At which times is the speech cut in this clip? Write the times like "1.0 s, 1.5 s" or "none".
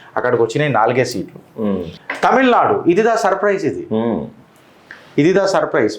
1.9 s